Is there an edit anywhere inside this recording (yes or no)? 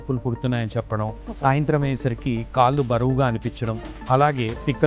no